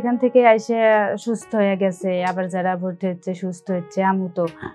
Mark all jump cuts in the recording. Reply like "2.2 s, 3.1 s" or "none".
none